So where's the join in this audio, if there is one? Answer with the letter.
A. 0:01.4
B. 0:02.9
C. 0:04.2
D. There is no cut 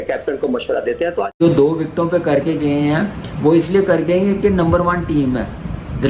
A